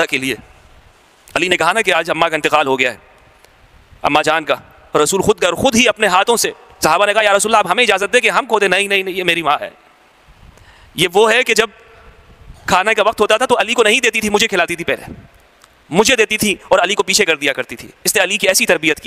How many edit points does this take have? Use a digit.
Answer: 0